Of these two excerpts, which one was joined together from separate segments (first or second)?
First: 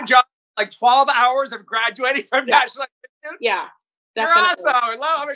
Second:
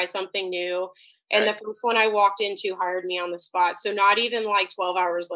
second